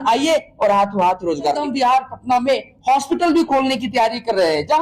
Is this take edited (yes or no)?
yes